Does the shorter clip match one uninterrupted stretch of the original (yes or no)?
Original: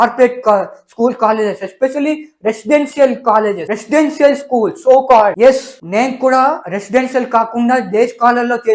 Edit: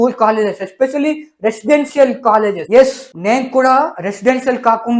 no